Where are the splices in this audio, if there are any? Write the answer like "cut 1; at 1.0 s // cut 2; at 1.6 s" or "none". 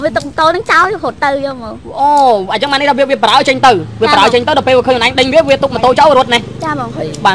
none